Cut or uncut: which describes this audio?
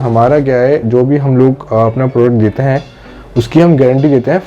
uncut